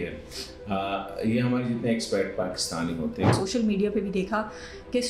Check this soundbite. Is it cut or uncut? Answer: cut